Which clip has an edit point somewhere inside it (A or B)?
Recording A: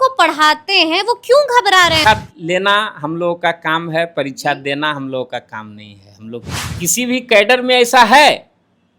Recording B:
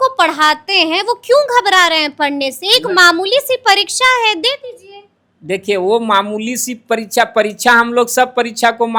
A